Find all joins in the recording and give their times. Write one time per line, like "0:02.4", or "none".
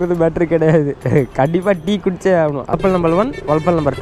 0:02.7